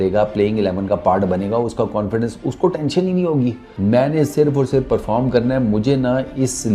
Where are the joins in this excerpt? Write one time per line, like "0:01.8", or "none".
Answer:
0:03.7

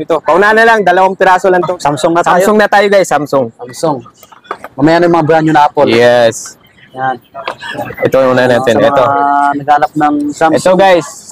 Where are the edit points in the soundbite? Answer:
0:01.7

